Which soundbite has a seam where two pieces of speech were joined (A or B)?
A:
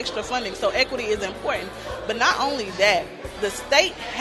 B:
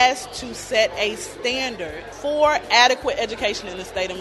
B